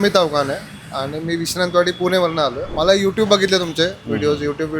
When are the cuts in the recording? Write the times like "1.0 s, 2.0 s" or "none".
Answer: 2.6 s